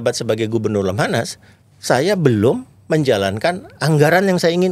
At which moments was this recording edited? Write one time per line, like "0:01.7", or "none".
none